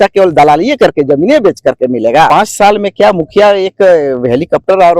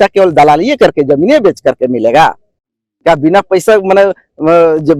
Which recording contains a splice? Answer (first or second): first